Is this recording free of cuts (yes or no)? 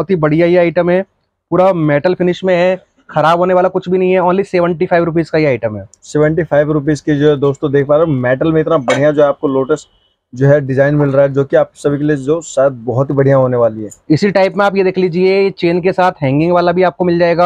yes